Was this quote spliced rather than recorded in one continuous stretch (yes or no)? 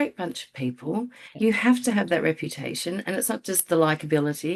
no